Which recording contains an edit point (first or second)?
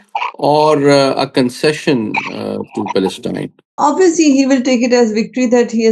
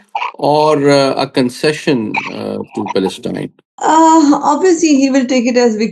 first